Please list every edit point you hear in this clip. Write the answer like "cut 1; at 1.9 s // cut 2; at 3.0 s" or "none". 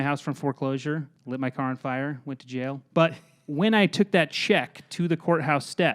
cut 1; at 1.1 s // cut 2; at 2.8 s